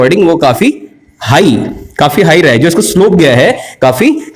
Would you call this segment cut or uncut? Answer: uncut